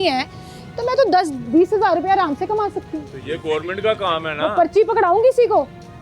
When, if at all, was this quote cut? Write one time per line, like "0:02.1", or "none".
none